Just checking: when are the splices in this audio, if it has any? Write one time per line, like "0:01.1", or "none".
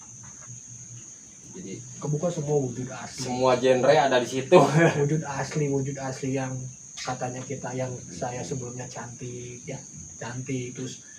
none